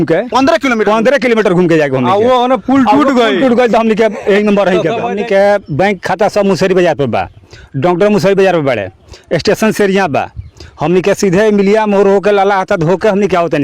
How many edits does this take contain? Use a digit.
1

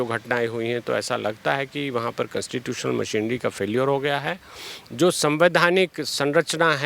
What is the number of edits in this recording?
0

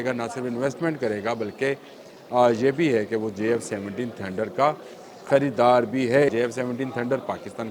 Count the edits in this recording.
1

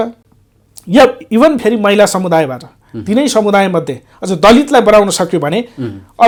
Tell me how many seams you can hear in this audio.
0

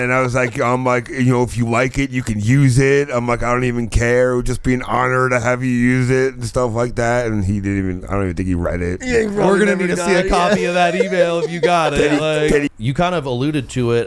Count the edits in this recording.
1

